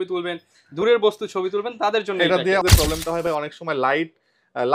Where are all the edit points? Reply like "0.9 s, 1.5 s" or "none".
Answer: 2.6 s